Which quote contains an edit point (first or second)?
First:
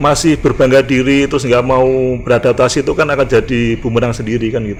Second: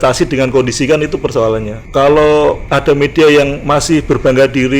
second